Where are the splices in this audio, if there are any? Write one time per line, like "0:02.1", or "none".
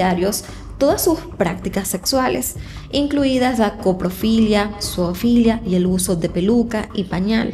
none